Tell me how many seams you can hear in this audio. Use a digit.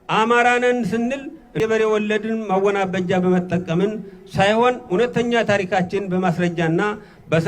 1